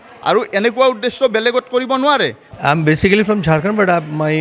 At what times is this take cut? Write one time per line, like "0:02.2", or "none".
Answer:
0:02.4